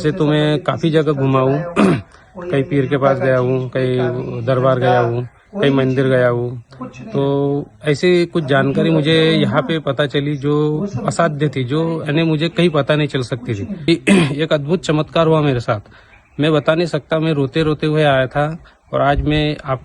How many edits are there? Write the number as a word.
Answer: one